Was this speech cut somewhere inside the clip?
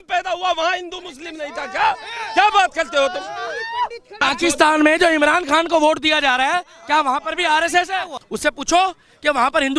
yes; 2 cuts; at 4.2 s, 8.2 s

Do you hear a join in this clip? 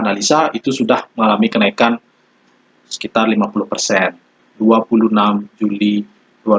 yes; 1 cut; at 4.4 s

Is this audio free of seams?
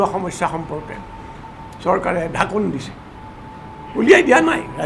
yes; 0 cuts

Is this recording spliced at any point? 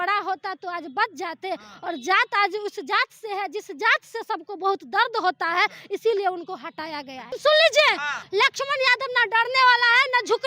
yes; 2 cuts; at 7.3 s, 8.2 s

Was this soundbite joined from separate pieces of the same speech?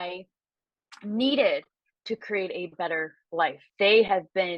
yes; 1 cut; at 3.6 s

